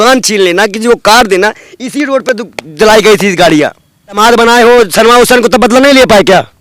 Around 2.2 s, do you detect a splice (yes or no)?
no